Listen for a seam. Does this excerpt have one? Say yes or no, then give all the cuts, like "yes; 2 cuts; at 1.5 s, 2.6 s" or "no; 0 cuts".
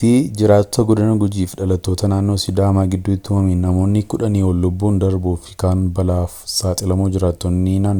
no; 0 cuts